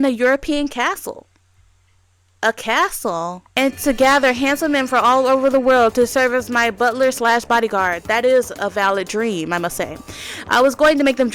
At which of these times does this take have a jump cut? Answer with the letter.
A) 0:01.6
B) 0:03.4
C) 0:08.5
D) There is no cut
B